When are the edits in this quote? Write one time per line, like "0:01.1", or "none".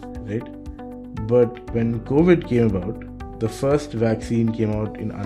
0:01.6